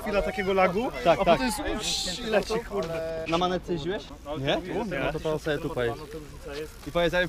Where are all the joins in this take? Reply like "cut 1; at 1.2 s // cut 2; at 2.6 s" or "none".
cut 1; at 3.2 s // cut 2; at 4.1 s